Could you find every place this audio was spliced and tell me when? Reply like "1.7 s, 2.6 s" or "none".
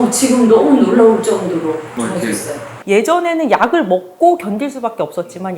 2.7 s